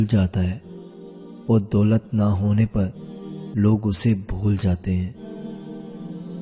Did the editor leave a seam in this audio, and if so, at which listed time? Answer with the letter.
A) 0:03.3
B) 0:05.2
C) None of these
B